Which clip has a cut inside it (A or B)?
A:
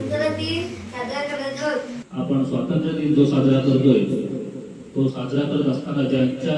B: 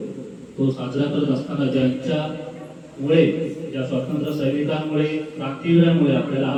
A